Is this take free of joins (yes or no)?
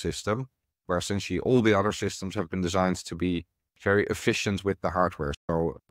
yes